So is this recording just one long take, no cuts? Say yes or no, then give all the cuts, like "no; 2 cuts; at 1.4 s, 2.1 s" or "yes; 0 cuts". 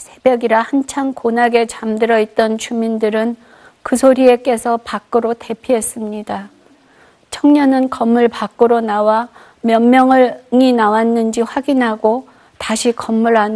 no; 1 cut; at 8.0 s